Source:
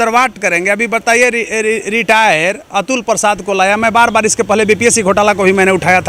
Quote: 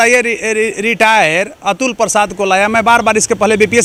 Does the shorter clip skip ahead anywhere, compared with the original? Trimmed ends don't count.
no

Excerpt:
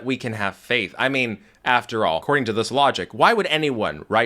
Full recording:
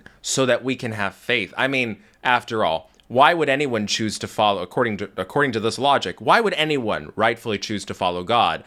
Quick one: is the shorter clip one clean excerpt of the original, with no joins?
no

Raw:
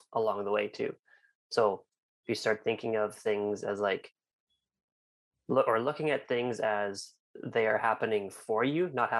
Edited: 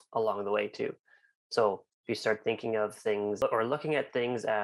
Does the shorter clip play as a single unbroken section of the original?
no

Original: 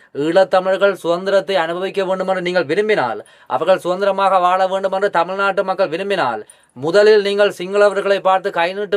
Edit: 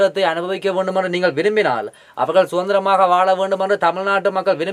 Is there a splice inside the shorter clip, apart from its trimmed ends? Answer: no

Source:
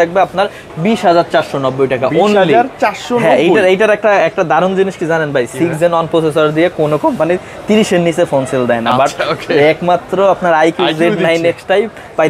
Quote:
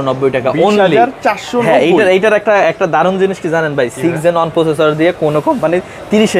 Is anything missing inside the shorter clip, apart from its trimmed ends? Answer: no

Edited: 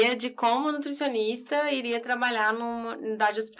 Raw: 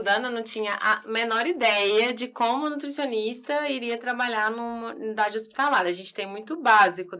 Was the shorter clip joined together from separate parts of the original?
no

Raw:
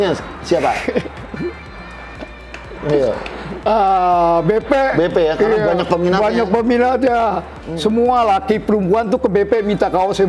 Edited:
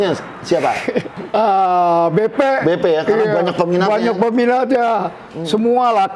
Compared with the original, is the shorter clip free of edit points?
no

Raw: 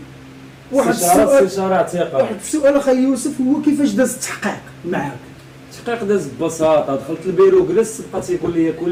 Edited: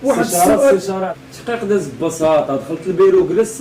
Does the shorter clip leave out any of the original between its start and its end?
yes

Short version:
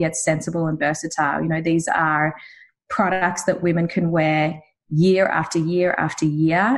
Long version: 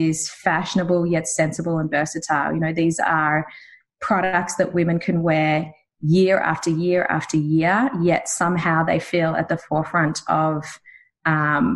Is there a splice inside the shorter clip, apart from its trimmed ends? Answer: no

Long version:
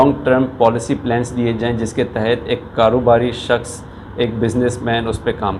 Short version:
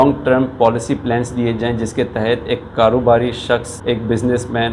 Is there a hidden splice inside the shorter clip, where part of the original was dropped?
yes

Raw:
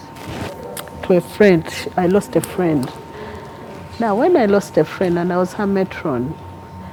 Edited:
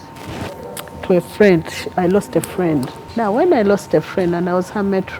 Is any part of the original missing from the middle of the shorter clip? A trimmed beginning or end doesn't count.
yes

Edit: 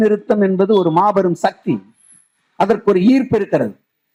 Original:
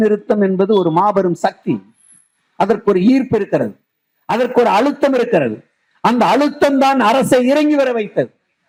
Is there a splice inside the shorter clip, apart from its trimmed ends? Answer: no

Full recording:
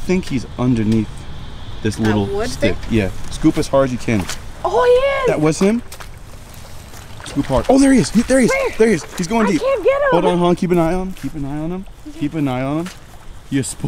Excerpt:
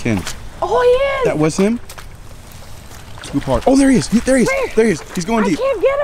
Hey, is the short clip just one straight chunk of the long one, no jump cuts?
yes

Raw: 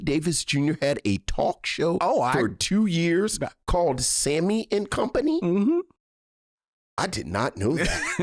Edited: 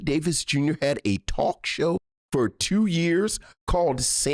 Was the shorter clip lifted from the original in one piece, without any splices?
yes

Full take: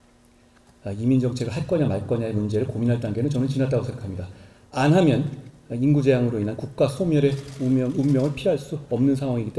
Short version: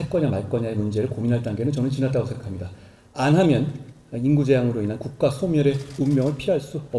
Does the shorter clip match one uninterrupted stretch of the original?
no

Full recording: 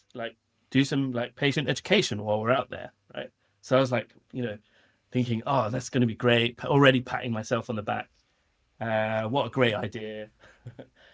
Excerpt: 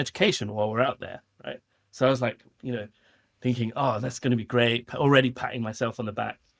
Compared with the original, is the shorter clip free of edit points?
yes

